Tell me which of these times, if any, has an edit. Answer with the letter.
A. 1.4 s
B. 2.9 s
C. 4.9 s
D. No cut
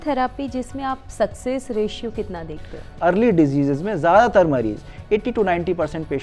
B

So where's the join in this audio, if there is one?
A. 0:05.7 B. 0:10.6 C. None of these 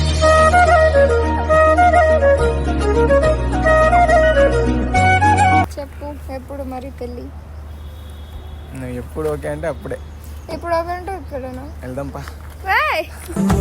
A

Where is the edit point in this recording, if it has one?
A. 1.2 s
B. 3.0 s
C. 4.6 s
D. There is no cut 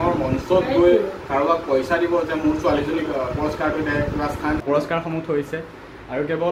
C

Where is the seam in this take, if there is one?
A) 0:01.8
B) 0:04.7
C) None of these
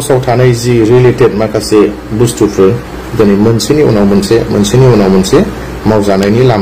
C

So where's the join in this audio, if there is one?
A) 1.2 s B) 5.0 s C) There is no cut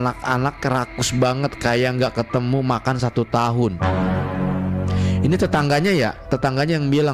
C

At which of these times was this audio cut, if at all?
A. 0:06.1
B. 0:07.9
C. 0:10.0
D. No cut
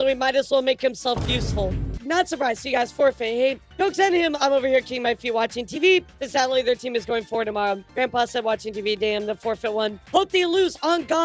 D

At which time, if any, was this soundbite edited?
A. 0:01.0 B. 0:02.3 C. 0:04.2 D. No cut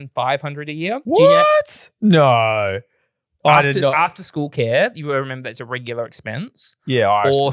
A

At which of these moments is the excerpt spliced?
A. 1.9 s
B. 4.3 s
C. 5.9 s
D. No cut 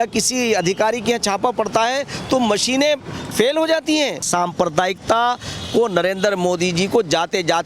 B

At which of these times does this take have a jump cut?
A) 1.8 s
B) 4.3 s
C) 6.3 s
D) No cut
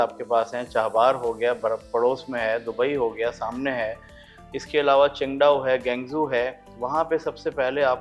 D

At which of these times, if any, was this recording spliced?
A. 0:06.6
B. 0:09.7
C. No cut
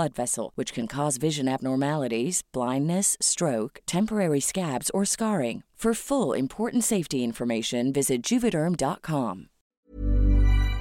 B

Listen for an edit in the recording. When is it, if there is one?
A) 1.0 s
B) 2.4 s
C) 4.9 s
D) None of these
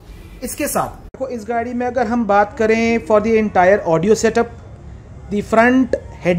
A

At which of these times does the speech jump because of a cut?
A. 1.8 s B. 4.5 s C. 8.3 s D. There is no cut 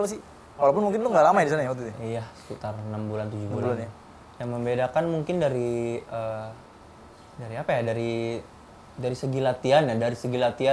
D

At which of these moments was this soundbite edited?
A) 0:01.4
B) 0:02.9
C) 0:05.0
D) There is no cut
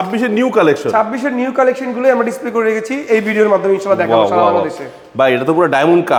D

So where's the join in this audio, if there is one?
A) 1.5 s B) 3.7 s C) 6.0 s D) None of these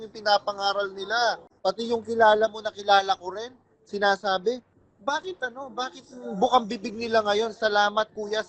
A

